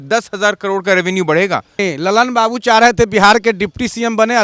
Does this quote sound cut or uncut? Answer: cut